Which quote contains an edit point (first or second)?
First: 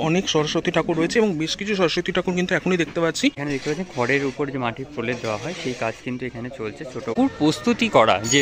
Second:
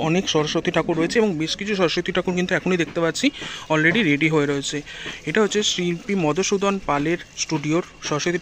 first